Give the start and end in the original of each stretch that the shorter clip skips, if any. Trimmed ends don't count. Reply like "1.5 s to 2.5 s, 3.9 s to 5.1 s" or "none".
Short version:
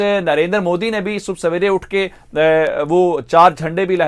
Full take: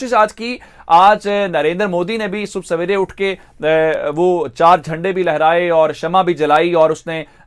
none